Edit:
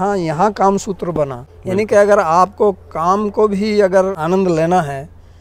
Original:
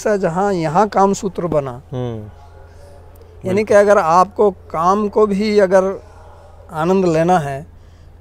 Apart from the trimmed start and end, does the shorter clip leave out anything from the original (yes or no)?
yes